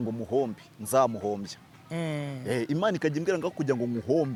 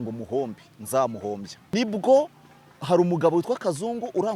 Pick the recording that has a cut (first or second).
second